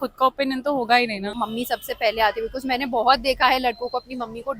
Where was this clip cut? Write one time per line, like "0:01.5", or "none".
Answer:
0:01.3